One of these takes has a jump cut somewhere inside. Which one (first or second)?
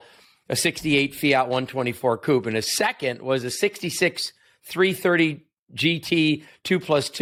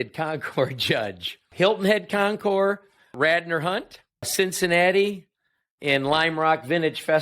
second